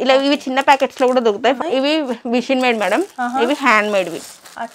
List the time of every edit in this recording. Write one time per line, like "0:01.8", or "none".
0:01.6